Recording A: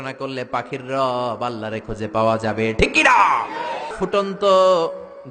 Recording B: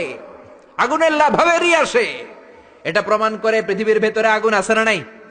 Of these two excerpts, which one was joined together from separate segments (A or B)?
A